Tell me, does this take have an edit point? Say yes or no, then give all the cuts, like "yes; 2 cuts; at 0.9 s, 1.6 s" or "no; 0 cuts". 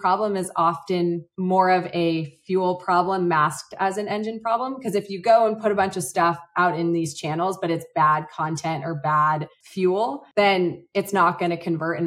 yes; 1 cut; at 10.2 s